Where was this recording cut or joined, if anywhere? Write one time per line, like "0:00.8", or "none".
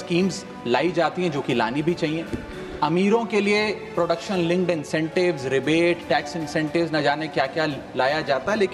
none